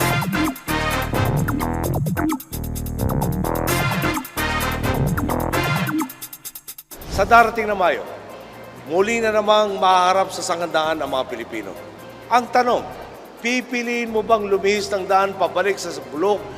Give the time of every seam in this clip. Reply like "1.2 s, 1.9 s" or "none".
11.6 s

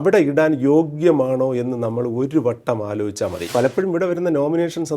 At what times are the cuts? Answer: 3.5 s

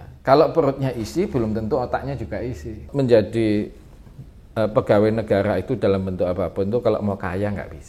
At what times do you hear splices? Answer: 2.8 s

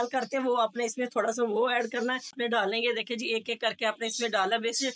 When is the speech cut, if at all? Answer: 2.3 s

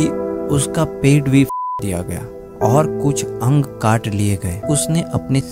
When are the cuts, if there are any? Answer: 4.6 s

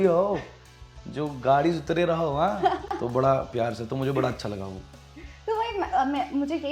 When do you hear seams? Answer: none

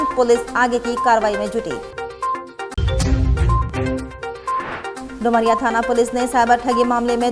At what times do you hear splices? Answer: none

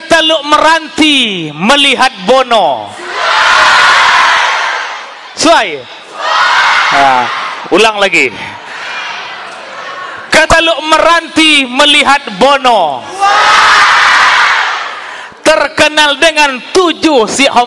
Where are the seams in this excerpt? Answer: none

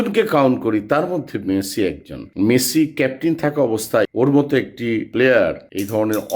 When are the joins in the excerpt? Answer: 2.2 s, 4.1 s

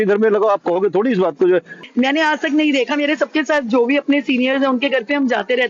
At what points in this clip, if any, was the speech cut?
1.8 s

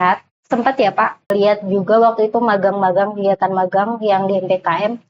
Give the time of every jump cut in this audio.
1.3 s

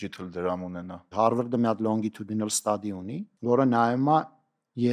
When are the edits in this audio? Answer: 1.1 s, 3.3 s

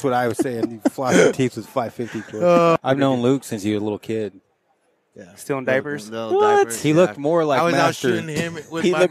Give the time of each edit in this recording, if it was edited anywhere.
2.8 s

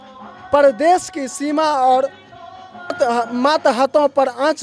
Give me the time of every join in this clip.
3.0 s

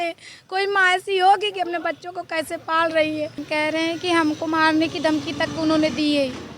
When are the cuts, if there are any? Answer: 3.4 s

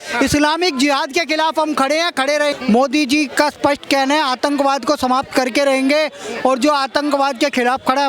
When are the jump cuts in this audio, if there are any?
2.5 s

